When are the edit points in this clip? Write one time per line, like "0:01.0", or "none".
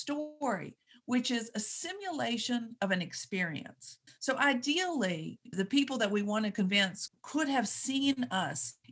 none